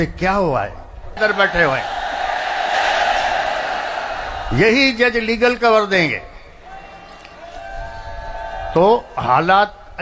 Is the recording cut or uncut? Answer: cut